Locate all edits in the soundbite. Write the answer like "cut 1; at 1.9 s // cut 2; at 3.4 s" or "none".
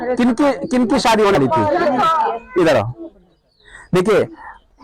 cut 1; at 1.4 s